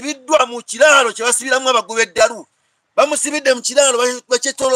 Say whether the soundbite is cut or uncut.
uncut